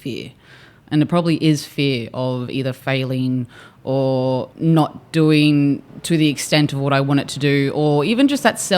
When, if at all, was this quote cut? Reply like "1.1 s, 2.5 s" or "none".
2.8 s, 4.5 s, 5.9 s